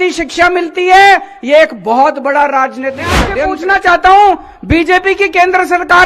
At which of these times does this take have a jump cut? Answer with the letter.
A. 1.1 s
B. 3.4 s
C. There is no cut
B